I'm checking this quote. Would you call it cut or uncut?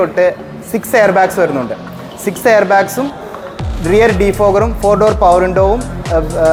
uncut